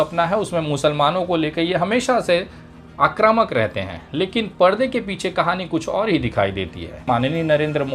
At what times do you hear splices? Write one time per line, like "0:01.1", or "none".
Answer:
0:07.0

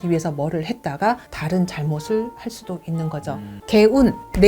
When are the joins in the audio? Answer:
0:03.6

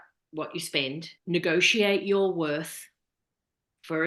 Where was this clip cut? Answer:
0:01.1

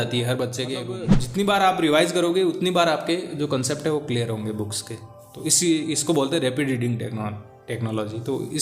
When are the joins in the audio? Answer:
0:01.1

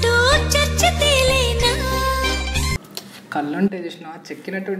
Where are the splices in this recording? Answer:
0:02.8

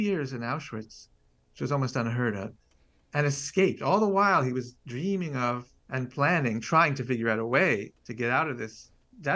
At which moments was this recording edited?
0:05.8
0:08.0

